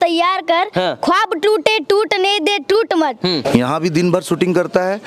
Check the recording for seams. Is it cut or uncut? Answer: cut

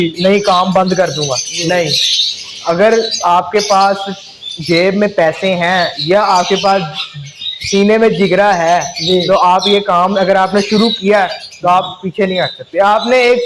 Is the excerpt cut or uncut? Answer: uncut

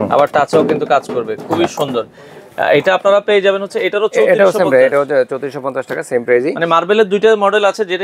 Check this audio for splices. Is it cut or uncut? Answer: uncut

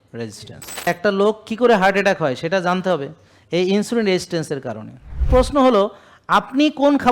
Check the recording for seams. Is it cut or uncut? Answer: cut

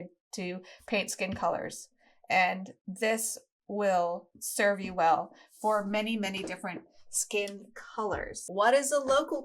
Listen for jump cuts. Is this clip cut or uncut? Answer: cut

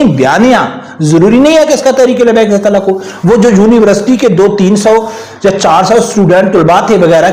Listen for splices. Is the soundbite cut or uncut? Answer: uncut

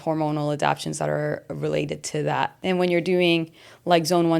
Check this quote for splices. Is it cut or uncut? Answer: cut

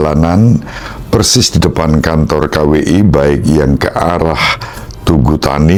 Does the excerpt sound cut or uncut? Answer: uncut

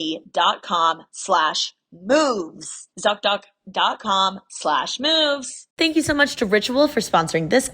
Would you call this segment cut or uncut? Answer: cut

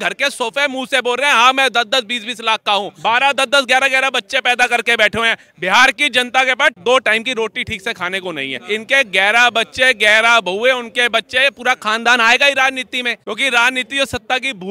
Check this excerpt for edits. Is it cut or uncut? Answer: cut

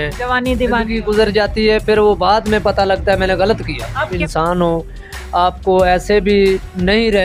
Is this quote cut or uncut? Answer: cut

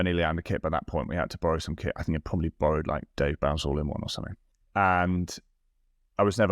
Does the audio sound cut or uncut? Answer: uncut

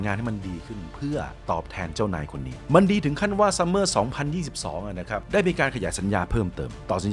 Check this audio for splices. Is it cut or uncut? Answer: uncut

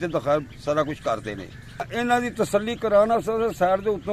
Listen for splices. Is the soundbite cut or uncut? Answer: cut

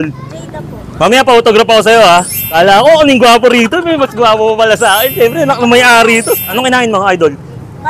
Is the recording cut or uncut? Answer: cut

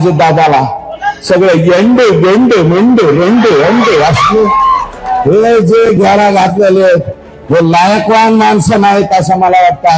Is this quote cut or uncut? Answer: uncut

